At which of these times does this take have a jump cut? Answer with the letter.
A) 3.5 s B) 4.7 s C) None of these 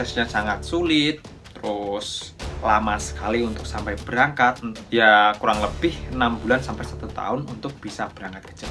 B